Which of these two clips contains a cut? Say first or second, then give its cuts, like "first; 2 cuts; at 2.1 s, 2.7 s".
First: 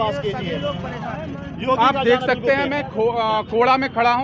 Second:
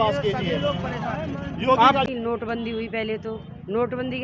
second; 1 cut; at 2.0 s